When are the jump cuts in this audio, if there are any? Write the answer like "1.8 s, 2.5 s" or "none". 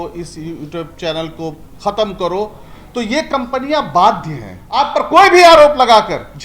4.9 s